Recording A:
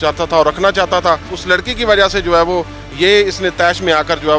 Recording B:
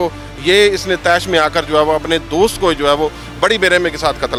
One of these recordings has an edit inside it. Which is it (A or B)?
A